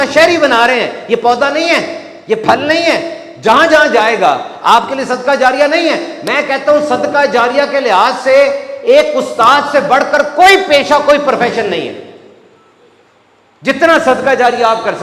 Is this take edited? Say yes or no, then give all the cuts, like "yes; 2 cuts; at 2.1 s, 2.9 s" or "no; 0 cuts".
no; 0 cuts